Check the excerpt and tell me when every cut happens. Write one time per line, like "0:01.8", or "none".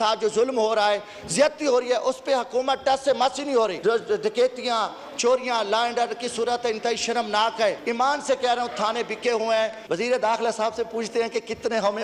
0:03.8
0:07.8
0:09.8